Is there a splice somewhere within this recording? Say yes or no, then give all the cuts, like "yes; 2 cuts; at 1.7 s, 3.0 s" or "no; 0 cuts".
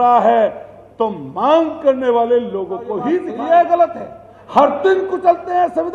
yes; 1 cut; at 3.3 s